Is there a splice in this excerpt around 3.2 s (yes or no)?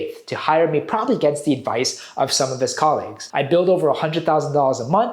yes